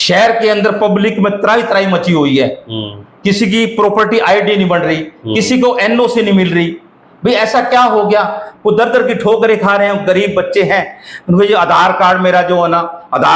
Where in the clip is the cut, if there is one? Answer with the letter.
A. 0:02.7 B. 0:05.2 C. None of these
C